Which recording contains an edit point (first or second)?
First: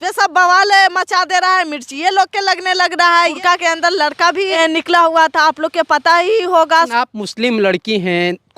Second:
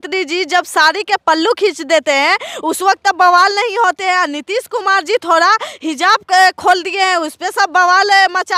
first